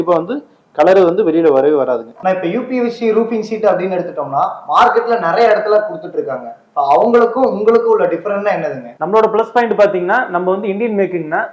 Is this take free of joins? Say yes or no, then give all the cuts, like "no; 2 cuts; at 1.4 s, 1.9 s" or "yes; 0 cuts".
yes; 0 cuts